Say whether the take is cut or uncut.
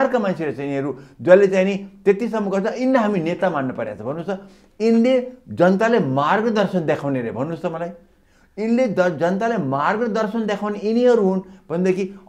uncut